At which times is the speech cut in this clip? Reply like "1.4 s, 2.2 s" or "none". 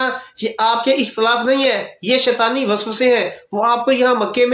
none